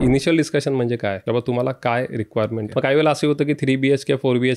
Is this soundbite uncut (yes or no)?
no